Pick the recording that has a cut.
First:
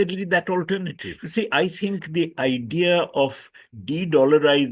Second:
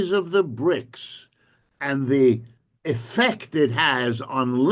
first; 1 cut; at 1.5 s

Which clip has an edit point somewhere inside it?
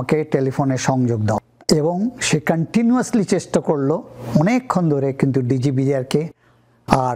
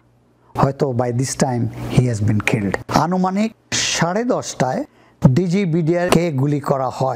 second; 1 cut; at 2.8 s

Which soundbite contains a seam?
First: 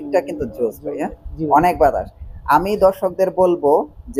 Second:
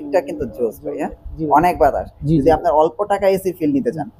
second; 1 cut; at 2.1 s

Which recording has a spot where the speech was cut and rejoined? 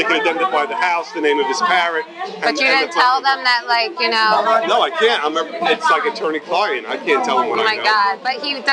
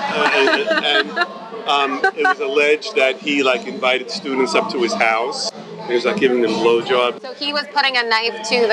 second; 2 cuts; at 5.5 s, 7.4 s

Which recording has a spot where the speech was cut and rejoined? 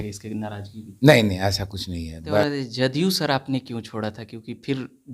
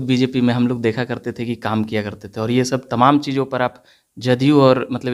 first; 1 cut; at 2.4 s

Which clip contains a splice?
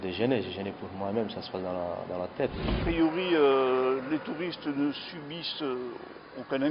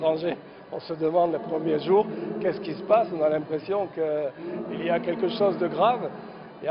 first; 1 cut; at 2.8 s

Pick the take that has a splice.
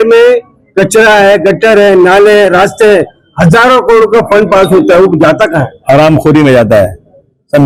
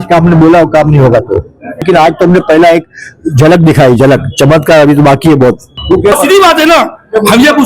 second; 2 cuts; at 1.9 s, 5.9 s

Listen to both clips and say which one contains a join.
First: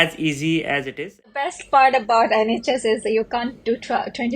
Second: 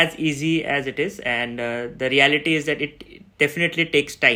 first; 1 cut; at 1.5 s

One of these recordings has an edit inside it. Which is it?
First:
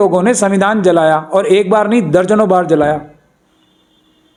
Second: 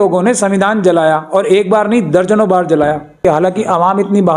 second; 1 cut; at 3.2 s

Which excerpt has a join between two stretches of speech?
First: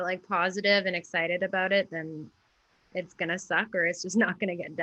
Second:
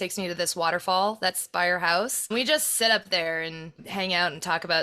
second; 2 cuts; at 2.2 s, 3.8 s

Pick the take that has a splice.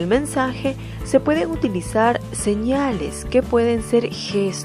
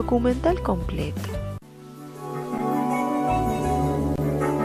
first; 1 cut; at 2.6 s

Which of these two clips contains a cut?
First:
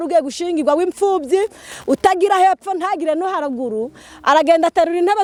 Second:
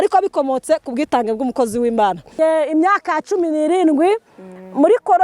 second; 1 cut; at 2.4 s

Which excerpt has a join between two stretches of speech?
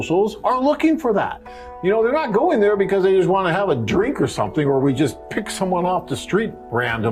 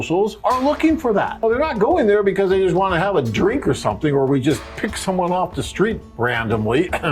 second; 1 cut; at 1.4 s

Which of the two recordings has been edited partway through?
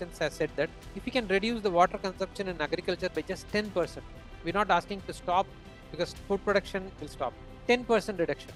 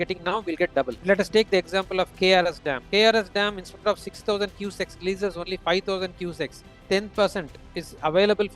second; 1 cut; at 0.9 s

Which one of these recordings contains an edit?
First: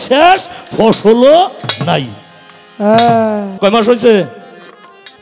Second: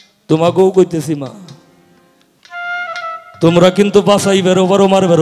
first; 1 cut; at 3.5 s

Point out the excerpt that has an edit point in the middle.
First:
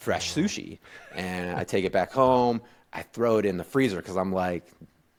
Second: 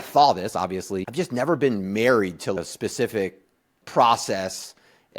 second; 3 cuts; at 1.0 s, 2.6 s, 3.8 s

